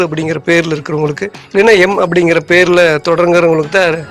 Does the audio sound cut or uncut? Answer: cut